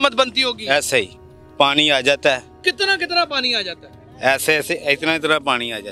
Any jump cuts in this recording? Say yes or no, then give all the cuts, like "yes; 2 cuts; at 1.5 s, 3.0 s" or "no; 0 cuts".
no; 0 cuts